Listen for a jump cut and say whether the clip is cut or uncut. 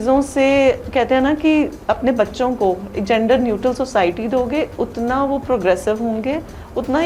uncut